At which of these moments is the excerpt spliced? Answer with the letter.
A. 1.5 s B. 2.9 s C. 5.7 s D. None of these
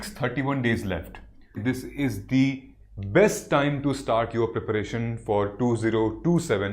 A